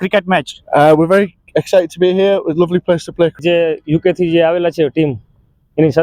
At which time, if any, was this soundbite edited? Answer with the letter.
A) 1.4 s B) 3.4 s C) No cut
B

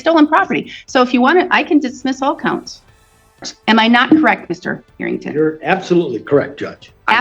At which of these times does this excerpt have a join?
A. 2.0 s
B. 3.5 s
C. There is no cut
B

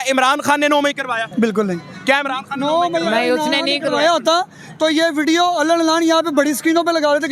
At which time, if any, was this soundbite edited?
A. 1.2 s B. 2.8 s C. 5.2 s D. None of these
A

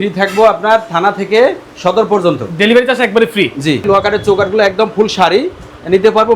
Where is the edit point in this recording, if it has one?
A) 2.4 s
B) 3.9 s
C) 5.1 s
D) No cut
B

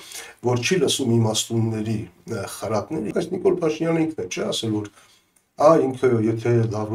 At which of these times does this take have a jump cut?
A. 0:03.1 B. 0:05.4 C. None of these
A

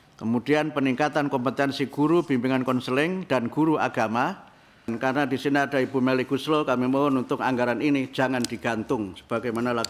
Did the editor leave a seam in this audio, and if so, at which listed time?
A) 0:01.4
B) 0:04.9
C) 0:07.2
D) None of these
B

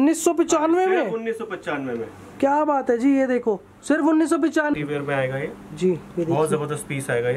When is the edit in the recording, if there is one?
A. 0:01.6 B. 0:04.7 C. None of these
B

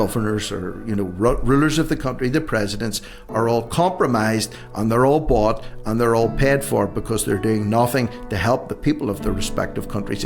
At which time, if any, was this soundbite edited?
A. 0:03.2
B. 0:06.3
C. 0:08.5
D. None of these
D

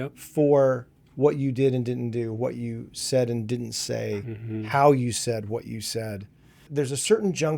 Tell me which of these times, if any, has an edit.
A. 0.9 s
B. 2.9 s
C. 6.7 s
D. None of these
C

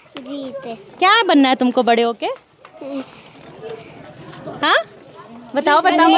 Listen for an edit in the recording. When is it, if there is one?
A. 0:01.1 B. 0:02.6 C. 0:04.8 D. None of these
D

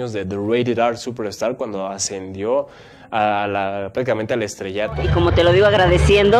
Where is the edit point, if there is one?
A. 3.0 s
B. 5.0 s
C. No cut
B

